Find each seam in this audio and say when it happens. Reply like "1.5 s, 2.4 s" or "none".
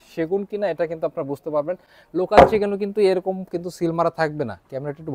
none

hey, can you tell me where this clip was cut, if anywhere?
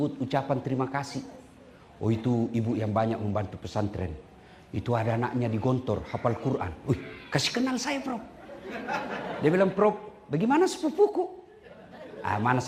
none

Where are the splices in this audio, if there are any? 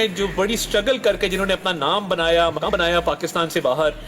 2.7 s

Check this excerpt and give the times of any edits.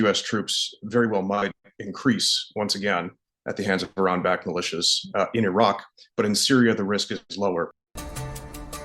7.8 s

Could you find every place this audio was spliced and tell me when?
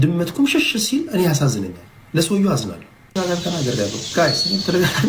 3.1 s

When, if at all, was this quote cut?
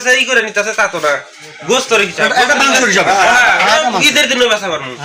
none

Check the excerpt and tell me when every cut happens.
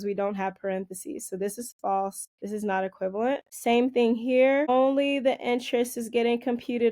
2.3 s, 3.5 s, 4.7 s

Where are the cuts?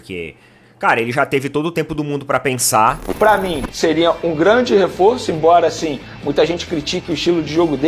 3.0 s

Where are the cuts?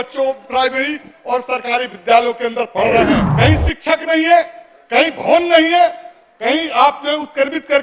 3.3 s

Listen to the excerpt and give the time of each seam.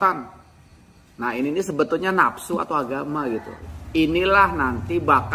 3.6 s

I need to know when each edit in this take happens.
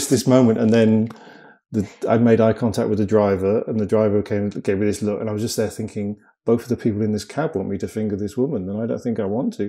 none

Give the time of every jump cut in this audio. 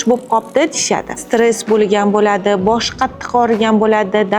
1.2 s

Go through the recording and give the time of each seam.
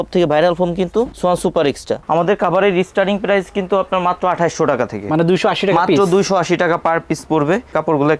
2.0 s

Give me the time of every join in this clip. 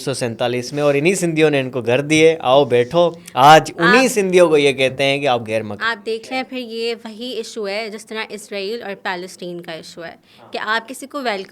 none

